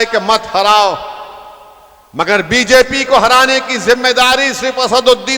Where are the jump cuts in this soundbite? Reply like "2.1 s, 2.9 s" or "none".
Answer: none